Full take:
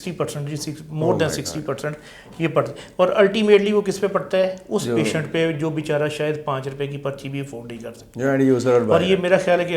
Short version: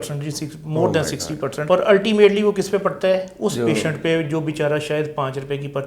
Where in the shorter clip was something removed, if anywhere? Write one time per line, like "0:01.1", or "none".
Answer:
0:01.6